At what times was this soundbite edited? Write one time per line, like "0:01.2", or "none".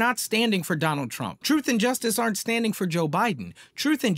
0:01.3